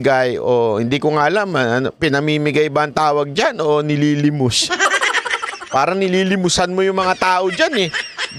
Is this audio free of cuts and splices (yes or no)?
yes